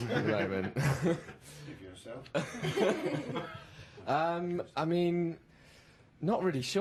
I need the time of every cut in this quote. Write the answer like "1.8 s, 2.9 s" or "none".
none